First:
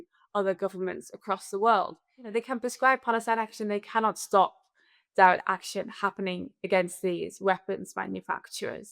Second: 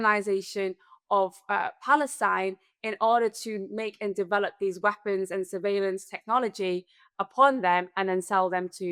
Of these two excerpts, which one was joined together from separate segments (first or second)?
first